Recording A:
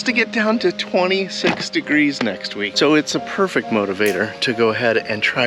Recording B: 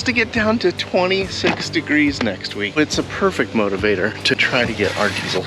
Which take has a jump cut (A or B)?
B